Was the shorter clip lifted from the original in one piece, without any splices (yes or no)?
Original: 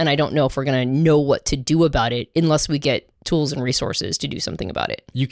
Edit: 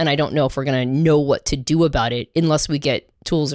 yes